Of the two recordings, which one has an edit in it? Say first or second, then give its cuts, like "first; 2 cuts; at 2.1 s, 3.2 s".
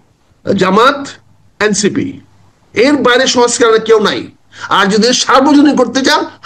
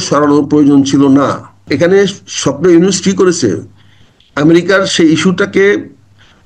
second; 1 cut; at 1.5 s